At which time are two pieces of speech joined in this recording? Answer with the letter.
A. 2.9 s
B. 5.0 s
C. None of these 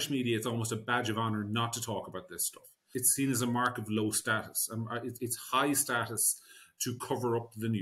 A